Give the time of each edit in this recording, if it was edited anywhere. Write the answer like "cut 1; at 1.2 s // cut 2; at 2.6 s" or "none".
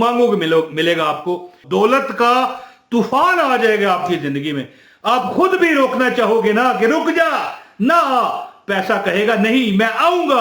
cut 1; at 1.6 s